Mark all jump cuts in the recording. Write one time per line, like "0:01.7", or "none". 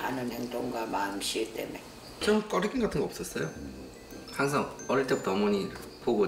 0:02.2